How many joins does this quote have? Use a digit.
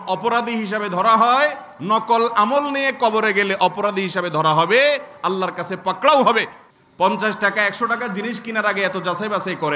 1